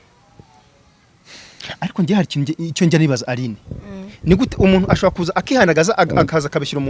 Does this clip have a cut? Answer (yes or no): no